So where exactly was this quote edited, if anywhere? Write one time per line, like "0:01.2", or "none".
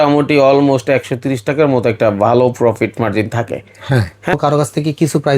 0:04.3